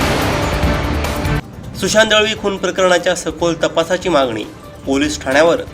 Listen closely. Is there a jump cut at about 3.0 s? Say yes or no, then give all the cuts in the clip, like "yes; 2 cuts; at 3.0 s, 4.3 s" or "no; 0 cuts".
no; 1 cut; at 1.4 s